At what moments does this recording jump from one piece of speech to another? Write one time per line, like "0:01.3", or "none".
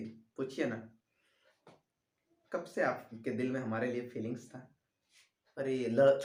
none